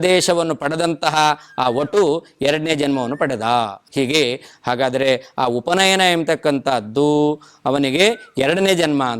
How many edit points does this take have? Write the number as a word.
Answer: one